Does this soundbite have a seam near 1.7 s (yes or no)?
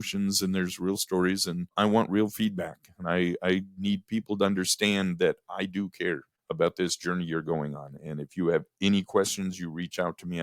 yes